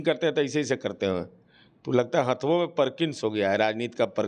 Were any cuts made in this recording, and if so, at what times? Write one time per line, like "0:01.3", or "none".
none